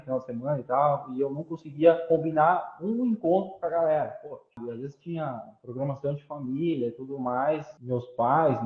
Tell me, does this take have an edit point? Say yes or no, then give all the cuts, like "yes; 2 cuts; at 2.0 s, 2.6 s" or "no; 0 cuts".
yes; 2 cuts; at 4.6 s, 7.7 s